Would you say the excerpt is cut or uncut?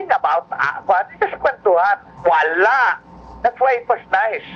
cut